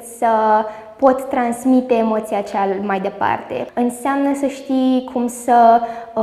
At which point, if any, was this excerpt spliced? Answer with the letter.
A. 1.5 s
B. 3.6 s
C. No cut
B